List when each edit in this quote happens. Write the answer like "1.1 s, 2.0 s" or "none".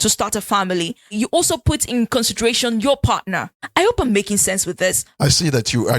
1.1 s